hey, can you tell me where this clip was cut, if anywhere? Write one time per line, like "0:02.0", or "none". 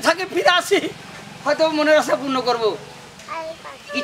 none